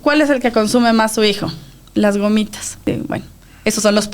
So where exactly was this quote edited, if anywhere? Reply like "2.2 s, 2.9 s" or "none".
2.9 s